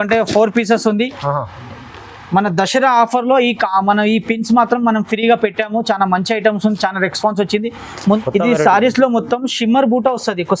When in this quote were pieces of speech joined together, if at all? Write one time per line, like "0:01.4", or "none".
0:08.2